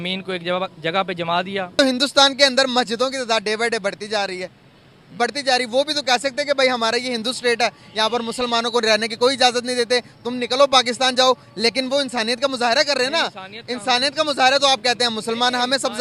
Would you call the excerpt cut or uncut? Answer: cut